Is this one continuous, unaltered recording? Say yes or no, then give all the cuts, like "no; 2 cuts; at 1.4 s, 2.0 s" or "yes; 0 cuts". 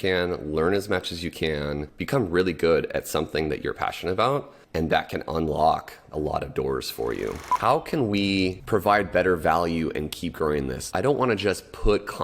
no; 6 cuts; at 1.9 s, 4.6 s, 6.1 s, 7.5 s, 8.6 s, 10.8 s